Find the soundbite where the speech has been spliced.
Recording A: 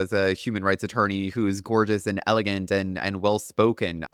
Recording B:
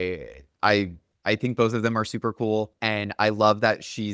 B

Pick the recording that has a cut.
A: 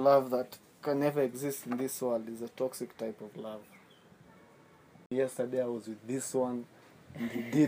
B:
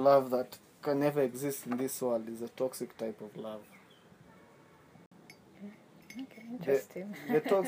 A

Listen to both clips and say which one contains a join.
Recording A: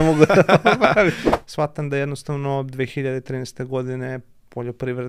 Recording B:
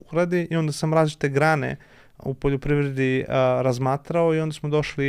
A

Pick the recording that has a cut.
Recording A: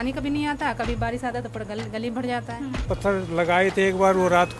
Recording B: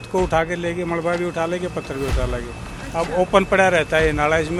A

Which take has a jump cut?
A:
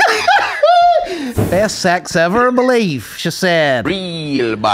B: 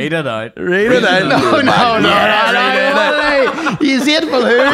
A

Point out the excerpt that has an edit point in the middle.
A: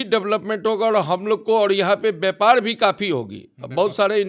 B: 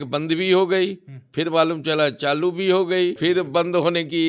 B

